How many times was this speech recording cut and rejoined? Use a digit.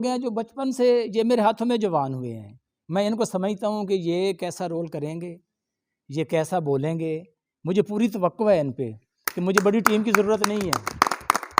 0